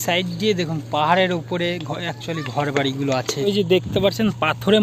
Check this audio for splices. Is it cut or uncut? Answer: cut